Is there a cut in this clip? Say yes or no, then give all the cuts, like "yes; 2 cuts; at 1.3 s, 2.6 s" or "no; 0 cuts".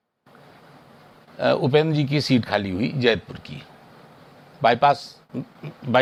no; 0 cuts